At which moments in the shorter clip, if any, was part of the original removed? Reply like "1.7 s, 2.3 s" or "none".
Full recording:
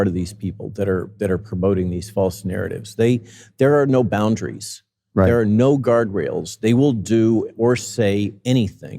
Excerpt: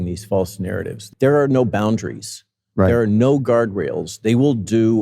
1.0 s